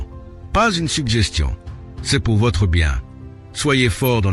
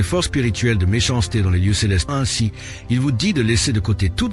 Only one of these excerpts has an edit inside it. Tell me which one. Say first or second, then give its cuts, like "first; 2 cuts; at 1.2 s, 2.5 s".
second; 1 cut; at 2.1 s